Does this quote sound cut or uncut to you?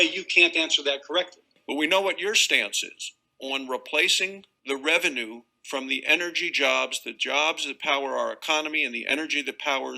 cut